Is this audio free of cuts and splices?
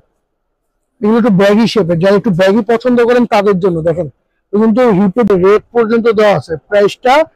no; 1 cut; at 5.3 s

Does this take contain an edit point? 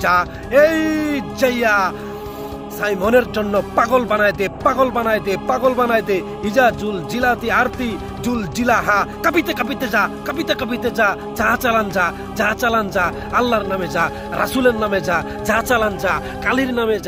no; 0 cuts

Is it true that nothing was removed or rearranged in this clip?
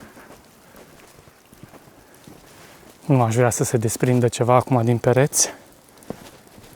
yes; 0 cuts

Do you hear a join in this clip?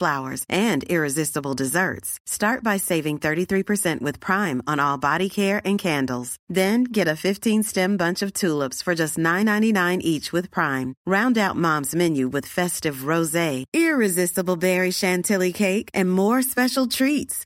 no; 0 cuts

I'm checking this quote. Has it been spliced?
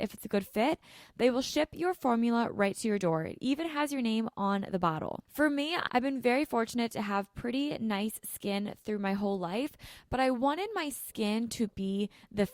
yes; 1 cut; at 5.8 s

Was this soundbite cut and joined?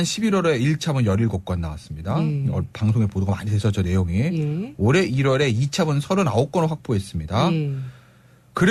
no; 0 cuts

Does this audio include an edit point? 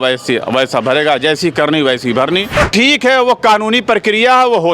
yes; 1 cut; at 2.6 s

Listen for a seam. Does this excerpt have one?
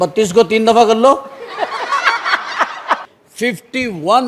yes; 1 cut; at 3.1 s

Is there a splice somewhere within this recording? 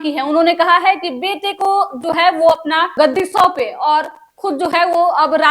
yes; 1 cut; at 2.9 s

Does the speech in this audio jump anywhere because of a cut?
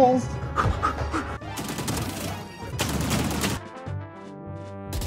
yes; 3 cuts; at 1.4 s, 2.7 s, 3.6 s

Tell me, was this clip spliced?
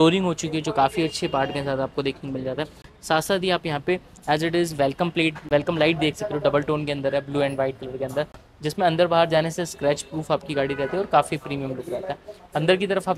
no; 0 cuts

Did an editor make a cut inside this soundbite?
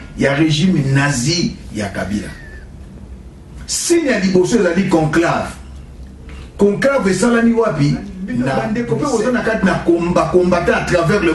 yes; 1 cut; at 8.5 s

